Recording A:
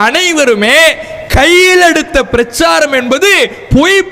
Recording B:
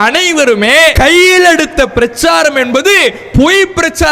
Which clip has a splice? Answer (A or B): B